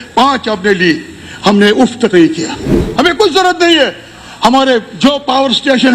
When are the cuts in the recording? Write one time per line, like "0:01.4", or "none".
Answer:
0:02.8